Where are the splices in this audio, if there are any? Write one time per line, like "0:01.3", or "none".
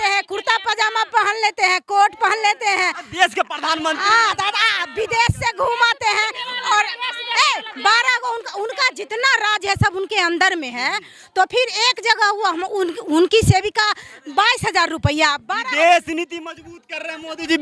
none